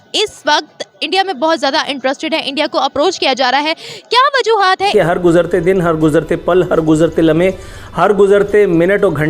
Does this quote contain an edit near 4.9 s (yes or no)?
yes